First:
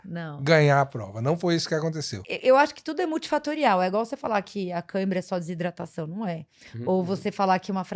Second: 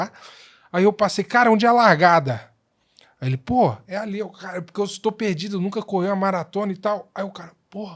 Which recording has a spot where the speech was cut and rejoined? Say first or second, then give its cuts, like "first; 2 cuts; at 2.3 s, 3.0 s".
first; 1 cut; at 2.3 s